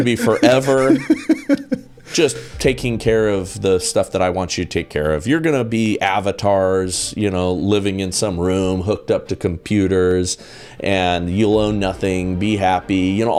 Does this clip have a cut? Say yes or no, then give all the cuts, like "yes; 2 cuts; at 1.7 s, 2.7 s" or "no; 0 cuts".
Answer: no; 0 cuts